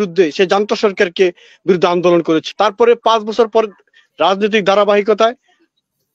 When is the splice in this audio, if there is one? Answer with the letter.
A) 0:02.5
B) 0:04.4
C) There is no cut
A